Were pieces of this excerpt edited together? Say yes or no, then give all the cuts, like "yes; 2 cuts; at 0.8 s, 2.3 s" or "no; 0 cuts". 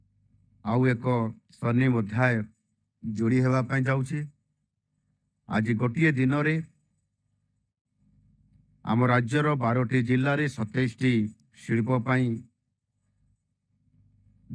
no; 0 cuts